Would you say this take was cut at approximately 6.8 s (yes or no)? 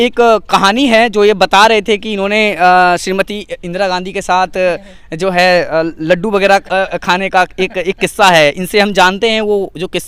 no